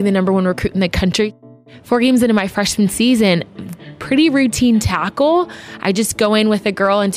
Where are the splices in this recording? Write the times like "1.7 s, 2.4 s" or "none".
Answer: 1.3 s

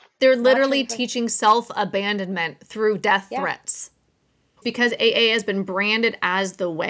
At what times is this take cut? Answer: 4.6 s

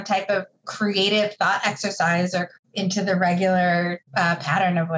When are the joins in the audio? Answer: 2.5 s, 4.0 s

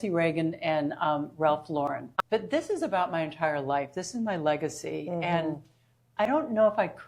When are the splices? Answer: 2.1 s

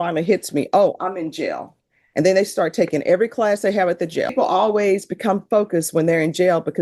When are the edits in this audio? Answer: 4.3 s

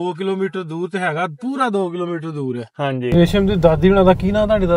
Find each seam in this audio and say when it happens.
none

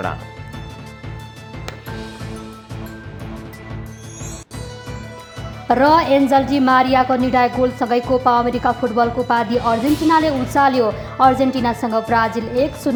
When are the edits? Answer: none

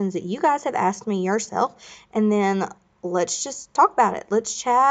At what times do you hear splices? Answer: none

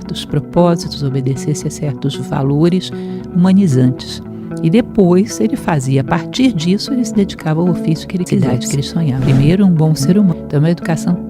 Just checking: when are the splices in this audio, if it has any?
10.3 s

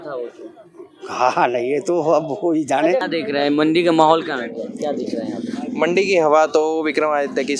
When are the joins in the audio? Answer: 3.0 s

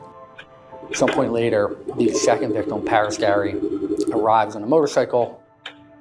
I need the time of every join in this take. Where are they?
none

